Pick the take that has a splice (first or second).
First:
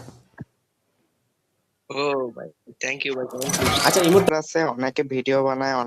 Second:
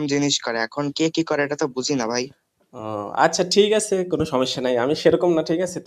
first